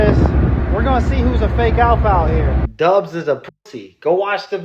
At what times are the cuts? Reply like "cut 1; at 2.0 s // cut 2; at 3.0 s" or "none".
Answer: cut 1; at 2.6 s